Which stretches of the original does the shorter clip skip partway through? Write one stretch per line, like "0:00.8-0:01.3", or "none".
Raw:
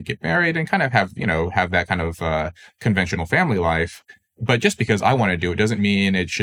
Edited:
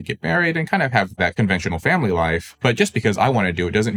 0:01.1-0:02.6
0:04.0-0:04.3

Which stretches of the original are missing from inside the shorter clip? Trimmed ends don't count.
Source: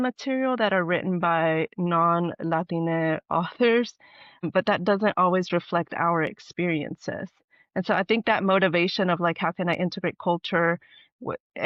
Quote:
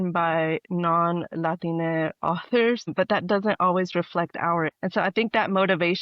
0:03.9-0:04.4
0:06.3-0:07.7

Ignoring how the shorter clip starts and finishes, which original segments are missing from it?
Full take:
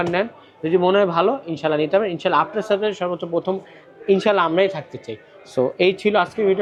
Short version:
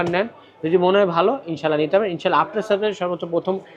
none

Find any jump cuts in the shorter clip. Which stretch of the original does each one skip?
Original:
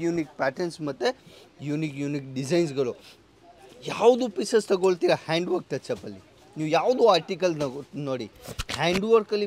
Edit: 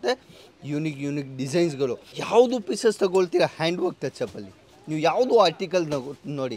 0:03.1-0:03.8

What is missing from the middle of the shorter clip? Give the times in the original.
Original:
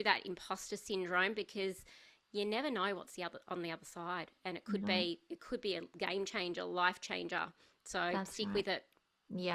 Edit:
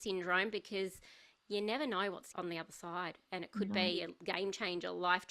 0:03.1-0:03.4
0:05.2-0:05.8

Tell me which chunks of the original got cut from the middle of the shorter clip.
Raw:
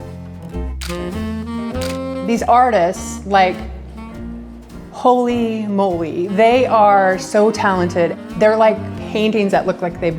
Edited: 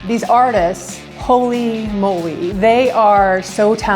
0:03.1-0:04.7

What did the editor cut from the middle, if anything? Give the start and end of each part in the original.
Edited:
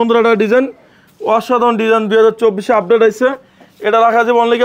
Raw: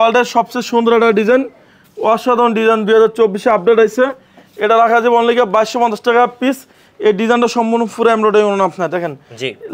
none

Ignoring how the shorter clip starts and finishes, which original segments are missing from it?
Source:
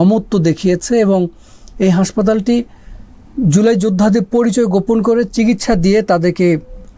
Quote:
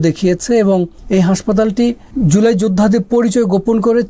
0:01.4-0:01.7
0:02.7-0:03.3

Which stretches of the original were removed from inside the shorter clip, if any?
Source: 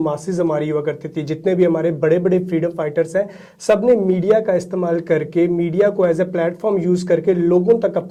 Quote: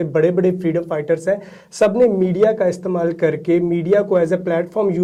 none

